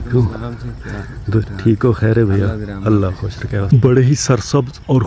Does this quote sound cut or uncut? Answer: cut